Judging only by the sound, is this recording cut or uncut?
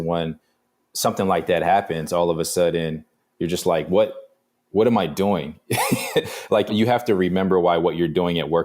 cut